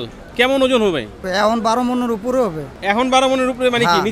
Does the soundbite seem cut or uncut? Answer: cut